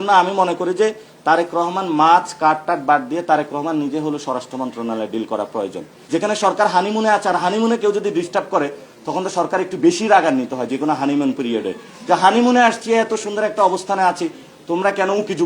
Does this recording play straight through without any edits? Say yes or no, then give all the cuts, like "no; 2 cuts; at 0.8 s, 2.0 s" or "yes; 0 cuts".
no; 1 cut; at 5.9 s